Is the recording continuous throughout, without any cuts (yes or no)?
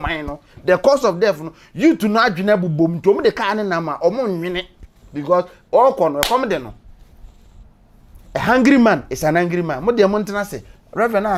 yes